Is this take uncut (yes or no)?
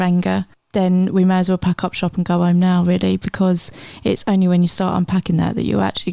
yes